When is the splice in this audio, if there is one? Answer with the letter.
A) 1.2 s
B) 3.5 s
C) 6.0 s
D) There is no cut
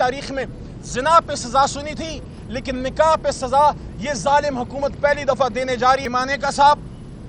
C